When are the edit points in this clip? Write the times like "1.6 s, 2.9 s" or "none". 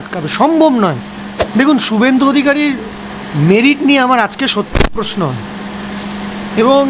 1.4 s